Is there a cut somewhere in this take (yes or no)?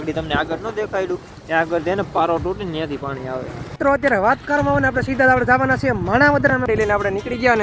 yes